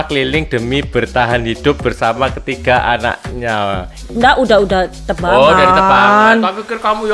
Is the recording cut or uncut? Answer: cut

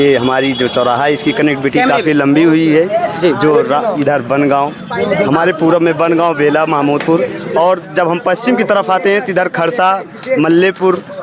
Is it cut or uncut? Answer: uncut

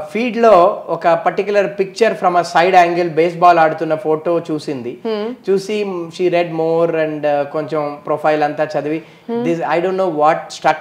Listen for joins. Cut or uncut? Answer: uncut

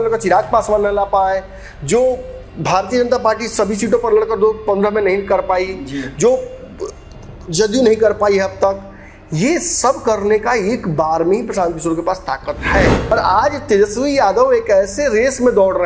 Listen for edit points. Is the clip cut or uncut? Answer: cut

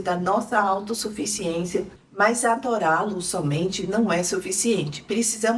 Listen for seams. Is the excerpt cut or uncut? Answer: cut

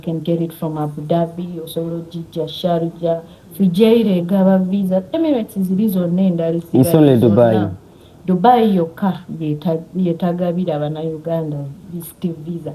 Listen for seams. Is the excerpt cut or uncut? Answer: uncut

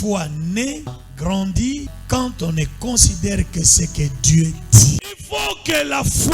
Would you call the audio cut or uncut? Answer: cut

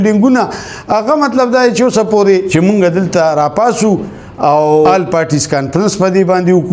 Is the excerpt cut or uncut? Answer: cut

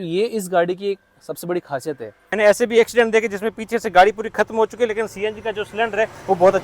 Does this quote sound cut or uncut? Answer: cut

